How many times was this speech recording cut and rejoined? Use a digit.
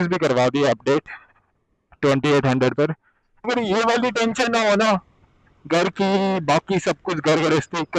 1